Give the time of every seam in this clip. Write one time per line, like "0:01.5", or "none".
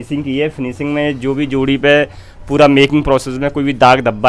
none